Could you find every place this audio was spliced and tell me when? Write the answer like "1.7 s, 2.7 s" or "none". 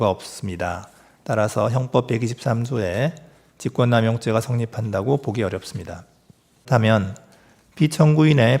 6.7 s